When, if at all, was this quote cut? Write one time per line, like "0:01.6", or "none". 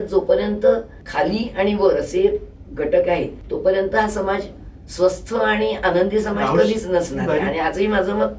0:01.0
0:03.4